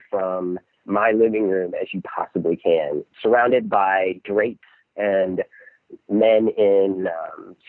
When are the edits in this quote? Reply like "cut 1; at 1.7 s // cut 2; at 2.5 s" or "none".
cut 1; at 3.1 s